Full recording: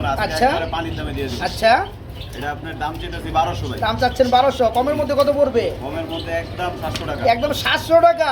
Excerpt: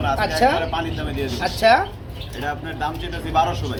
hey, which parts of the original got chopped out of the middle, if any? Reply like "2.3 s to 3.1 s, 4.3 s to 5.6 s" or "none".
none